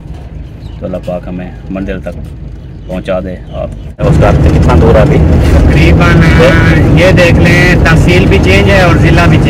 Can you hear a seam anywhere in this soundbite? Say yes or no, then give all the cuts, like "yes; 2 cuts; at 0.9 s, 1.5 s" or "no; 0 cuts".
yes; 1 cut; at 4.0 s